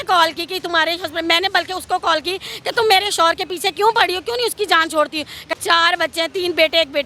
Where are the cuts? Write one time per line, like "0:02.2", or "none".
0:05.4